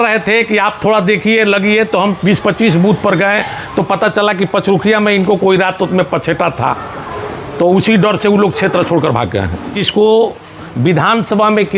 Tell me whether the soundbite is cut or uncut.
cut